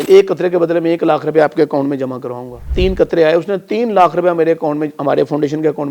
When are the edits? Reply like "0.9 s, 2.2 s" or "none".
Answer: 2.6 s